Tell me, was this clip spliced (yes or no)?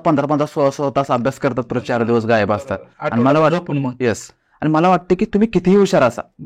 no